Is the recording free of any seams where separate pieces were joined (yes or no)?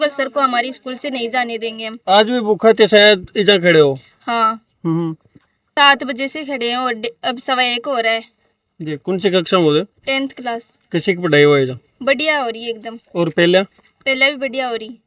yes